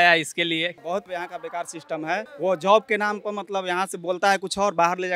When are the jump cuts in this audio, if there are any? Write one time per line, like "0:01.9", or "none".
0:00.8
0:02.3

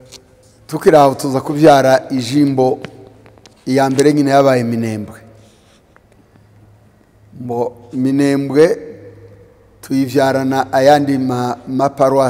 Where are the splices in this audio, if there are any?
none

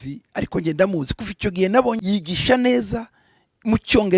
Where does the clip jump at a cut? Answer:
0:02.0

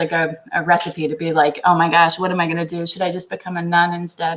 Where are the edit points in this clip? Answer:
none

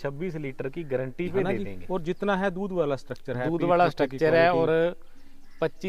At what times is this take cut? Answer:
0:01.5

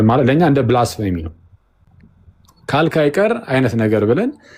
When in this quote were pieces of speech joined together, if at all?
none

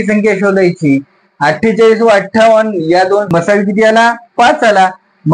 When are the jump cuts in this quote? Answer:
0:03.3

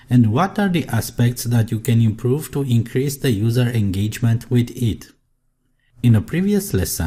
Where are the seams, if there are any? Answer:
none

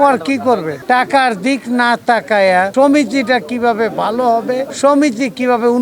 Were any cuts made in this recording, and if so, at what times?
0:00.8
0:02.7
0:04.7

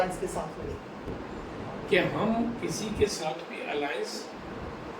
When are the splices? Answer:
0:01.1

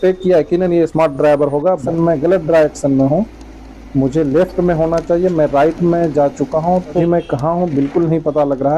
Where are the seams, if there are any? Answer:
0:01.8
0:07.0

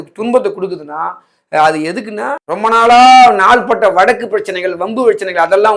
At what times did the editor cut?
0:02.4

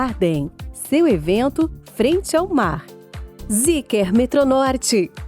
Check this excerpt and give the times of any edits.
0:03.4

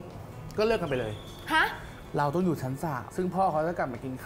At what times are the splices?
0:02.0

